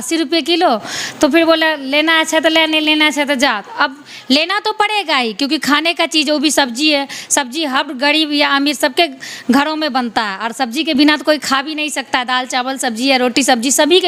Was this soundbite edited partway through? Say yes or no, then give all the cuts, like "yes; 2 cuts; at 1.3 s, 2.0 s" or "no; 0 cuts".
no; 0 cuts